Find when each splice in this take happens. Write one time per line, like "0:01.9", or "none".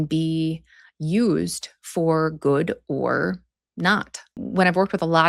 0:04.2